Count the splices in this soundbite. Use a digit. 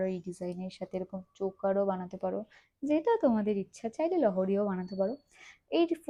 0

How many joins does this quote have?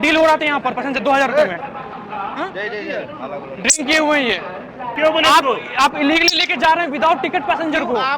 2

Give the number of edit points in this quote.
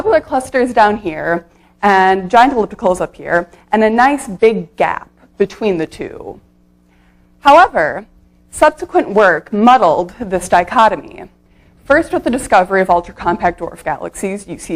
1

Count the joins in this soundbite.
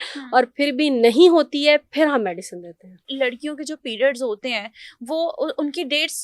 1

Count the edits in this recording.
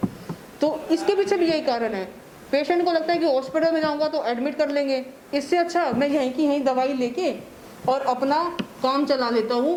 0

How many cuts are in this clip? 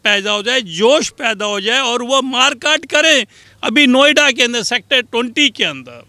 1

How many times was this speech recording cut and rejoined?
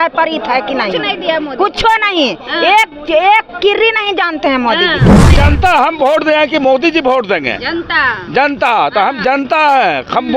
1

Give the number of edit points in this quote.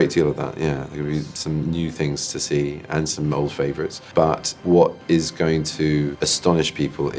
2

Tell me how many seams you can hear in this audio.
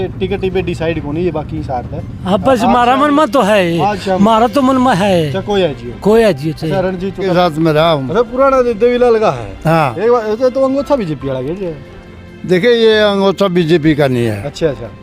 1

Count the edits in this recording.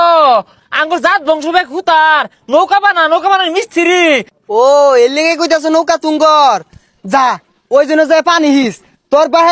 1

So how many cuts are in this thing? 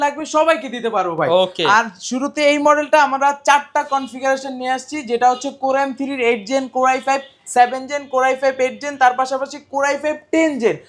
0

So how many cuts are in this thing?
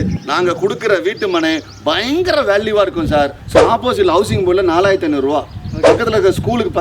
1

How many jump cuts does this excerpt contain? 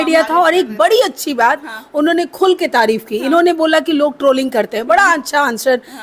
0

